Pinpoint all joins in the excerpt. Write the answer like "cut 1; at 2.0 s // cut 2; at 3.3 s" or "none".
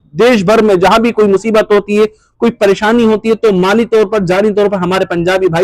none